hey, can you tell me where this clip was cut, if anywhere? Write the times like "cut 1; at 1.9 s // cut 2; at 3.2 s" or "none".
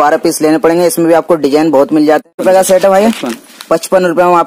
cut 1; at 2.3 s

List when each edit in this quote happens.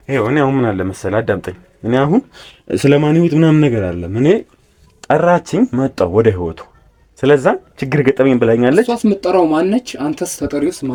none

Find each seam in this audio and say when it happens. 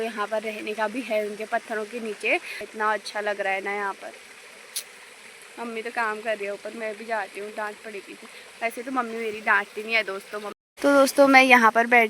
cut 1; at 2.7 s // cut 2; at 10.5 s

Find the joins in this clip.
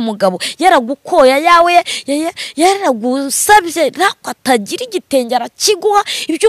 none

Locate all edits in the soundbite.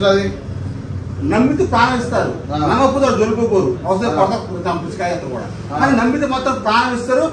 none

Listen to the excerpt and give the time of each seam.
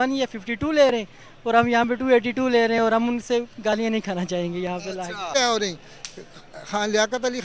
cut 1; at 5.3 s

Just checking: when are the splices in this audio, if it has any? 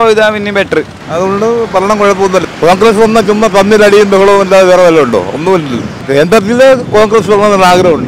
cut 1; at 1.0 s // cut 2; at 2.4 s // cut 3; at 6.0 s

